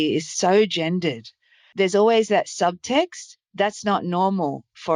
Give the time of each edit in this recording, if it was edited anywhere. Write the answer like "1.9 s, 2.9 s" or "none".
1.7 s